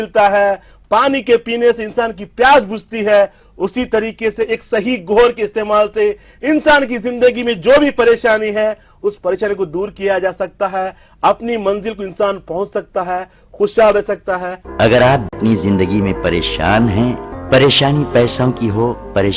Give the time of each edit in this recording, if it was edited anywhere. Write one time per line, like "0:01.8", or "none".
0:14.5
0:15.3